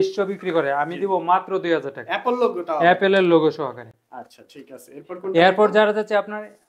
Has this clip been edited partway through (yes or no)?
no